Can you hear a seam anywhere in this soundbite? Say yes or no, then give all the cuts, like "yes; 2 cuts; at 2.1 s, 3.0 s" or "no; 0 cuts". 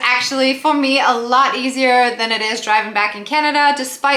no; 0 cuts